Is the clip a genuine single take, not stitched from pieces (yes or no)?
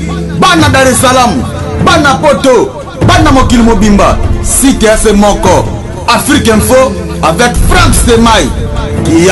yes